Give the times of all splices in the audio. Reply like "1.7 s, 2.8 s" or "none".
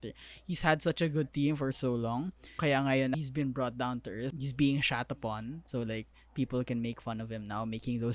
2.5 s, 3.1 s, 4.3 s